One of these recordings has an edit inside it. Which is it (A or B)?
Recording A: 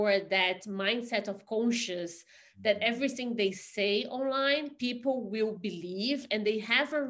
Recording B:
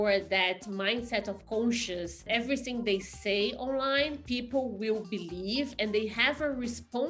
B